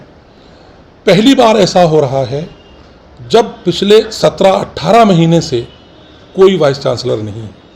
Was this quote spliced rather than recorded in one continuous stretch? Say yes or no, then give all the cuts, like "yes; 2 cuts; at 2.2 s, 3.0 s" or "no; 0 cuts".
no; 0 cuts